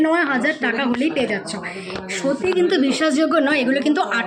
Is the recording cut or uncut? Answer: uncut